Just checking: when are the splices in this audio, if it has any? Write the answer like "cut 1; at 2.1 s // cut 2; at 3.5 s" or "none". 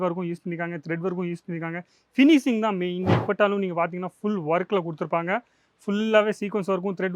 cut 1; at 3.2 s